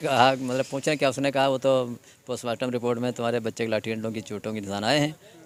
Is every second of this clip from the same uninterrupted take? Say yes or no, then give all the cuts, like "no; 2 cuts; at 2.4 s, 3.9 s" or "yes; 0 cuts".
yes; 0 cuts